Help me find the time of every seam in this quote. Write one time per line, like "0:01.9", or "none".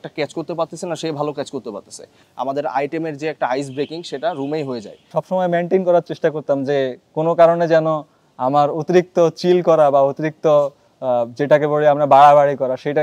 0:02.2
0:05.0